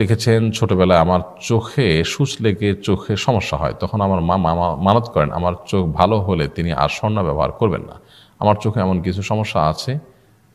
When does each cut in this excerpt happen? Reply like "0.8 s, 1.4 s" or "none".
none

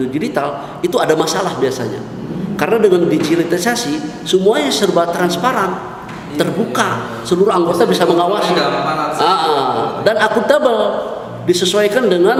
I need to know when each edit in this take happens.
none

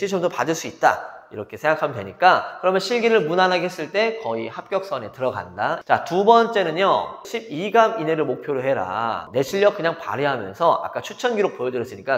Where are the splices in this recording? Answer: 5.8 s, 7.2 s, 9.3 s

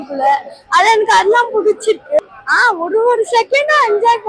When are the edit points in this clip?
2.2 s

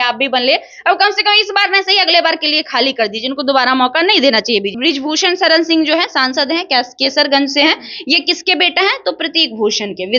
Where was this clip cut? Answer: 4.7 s

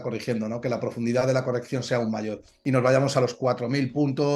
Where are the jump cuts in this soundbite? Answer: 2.5 s

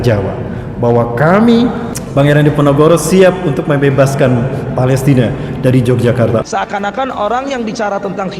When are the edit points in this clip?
6.5 s

